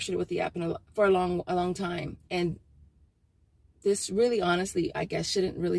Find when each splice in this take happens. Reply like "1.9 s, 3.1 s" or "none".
2.2 s